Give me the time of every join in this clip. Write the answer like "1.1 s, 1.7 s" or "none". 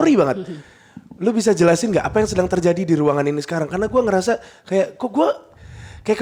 none